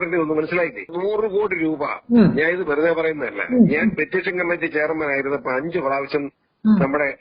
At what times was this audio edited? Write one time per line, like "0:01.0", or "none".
0:00.9